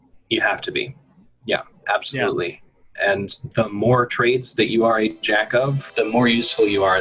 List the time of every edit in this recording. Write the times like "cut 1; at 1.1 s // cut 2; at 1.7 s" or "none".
cut 1; at 5.8 s